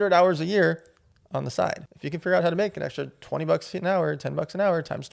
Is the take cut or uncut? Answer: cut